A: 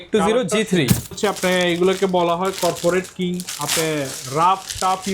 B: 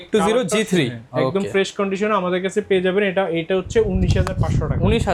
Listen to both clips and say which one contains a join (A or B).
A